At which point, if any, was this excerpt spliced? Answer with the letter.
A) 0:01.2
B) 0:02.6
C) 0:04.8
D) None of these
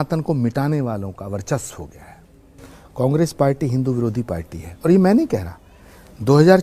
D